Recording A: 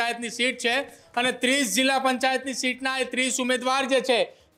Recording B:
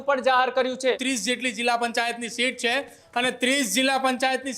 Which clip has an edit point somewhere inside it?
B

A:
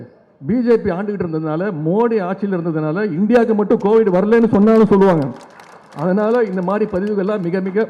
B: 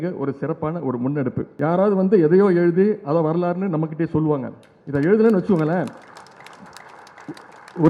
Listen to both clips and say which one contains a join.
B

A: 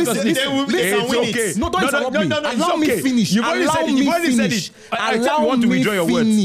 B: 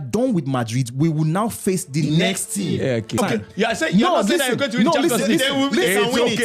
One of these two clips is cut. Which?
B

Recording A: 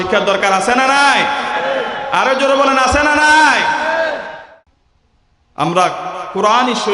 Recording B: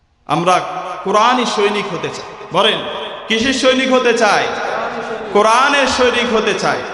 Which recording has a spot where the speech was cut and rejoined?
A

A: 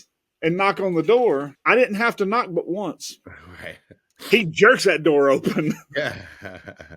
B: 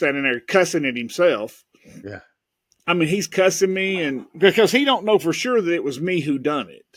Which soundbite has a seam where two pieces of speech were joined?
A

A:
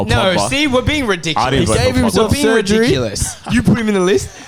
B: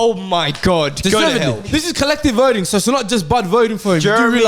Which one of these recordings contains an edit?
B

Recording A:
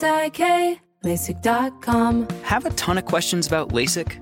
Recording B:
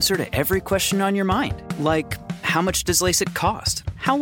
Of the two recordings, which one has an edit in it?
A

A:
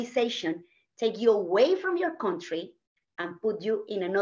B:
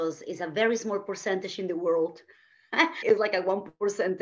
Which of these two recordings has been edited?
B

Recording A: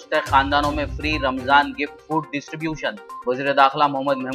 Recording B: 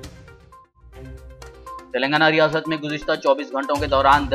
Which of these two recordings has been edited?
B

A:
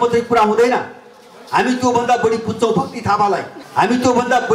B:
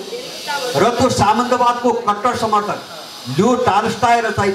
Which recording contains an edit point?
A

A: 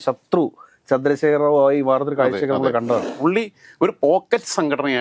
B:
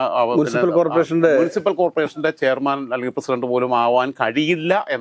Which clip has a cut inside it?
A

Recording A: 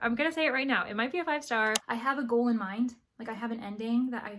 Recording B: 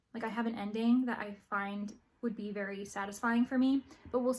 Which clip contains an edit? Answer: A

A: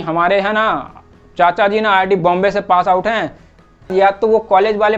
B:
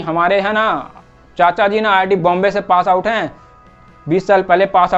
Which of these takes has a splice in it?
A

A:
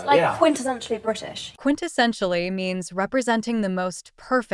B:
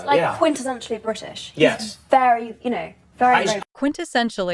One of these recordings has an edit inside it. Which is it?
A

